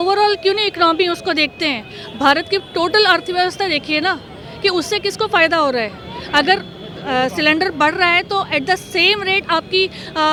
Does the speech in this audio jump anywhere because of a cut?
no; 0 cuts

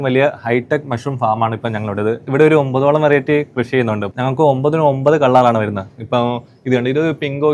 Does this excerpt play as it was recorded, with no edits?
no; 2 cuts; at 2.2 s, 4.0 s

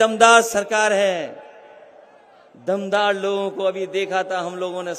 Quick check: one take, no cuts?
yes; 0 cuts

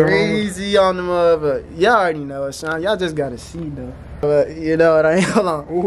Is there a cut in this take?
yes; 1 cut; at 4.2 s

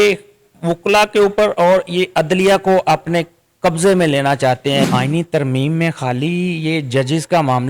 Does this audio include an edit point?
yes; 1 cut; at 4.9 s

